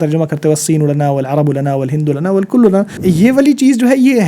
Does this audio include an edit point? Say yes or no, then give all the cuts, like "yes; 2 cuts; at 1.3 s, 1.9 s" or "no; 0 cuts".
yes; 1 cut; at 2.9 s